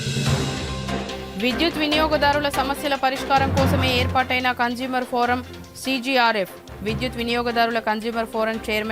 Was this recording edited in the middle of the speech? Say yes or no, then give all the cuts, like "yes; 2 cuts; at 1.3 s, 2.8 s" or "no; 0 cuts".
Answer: yes; 1 cut; at 1.2 s